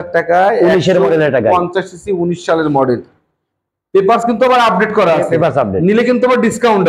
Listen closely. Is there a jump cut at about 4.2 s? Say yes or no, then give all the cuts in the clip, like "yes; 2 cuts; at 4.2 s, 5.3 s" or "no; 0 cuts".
no; 0 cuts